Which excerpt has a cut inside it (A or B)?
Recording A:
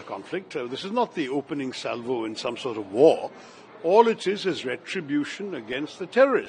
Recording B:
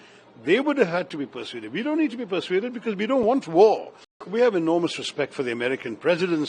B